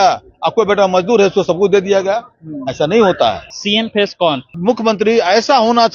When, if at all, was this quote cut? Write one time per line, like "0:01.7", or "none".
0:03.5
0:04.6